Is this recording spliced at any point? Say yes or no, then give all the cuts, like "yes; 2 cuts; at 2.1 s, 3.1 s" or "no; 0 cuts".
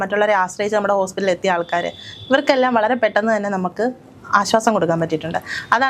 no; 0 cuts